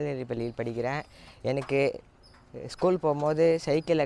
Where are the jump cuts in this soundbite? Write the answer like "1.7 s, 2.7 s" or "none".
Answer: none